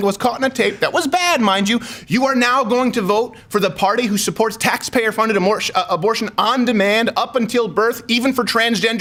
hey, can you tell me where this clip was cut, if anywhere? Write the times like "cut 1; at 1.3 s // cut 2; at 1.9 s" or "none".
none